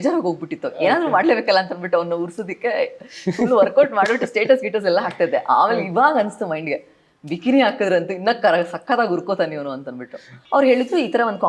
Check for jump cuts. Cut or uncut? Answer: cut